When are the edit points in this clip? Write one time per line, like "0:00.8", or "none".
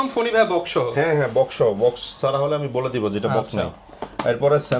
none